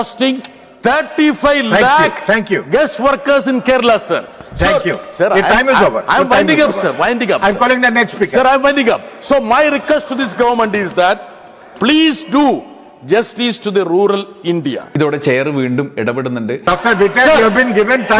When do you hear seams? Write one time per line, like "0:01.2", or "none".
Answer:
none